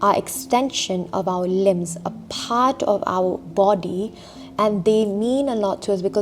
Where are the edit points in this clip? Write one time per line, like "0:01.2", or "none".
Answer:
none